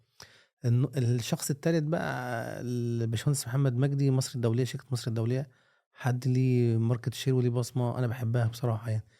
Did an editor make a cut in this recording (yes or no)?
no